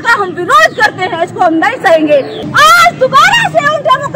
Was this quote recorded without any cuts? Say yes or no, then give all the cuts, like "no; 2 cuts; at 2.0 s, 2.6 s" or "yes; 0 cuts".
no; 1 cut; at 2.4 s